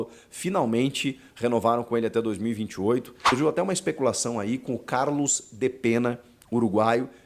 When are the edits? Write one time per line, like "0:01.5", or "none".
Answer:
0:03.3